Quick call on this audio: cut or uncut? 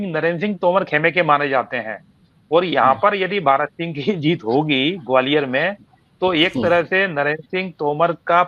uncut